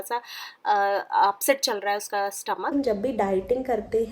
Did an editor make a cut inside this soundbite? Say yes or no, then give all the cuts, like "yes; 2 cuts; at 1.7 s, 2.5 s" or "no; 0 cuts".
yes; 1 cut; at 2.7 s